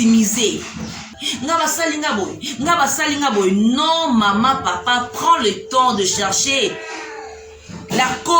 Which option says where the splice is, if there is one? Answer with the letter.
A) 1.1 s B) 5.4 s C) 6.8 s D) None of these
A